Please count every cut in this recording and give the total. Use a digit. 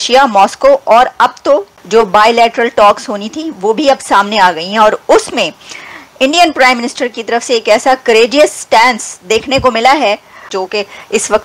2